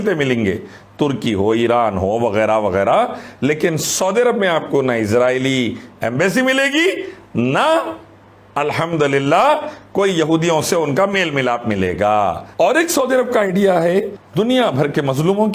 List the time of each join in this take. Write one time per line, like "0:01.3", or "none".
0:12.4